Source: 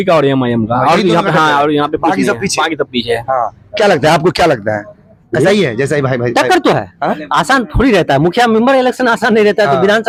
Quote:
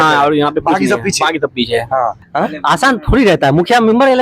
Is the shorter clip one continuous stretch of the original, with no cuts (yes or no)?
no